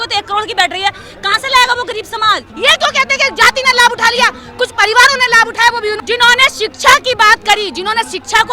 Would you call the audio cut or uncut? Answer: cut